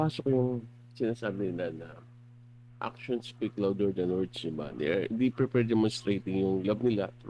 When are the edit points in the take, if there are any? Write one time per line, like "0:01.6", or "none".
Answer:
none